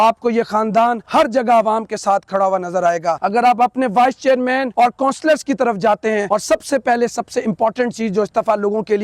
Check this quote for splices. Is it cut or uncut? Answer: cut